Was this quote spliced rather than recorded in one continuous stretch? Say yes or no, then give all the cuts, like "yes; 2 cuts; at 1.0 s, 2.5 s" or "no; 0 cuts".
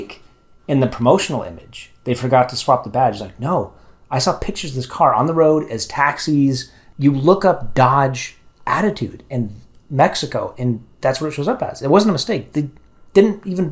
yes; 1 cut; at 6.7 s